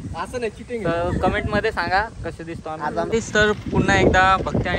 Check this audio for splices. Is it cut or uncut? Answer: cut